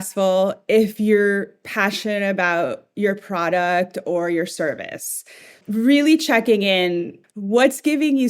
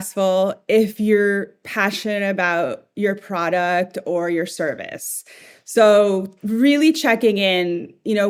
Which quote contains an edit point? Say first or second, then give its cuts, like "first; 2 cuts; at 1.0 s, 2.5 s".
first; 2 cuts; at 5.6 s, 7.2 s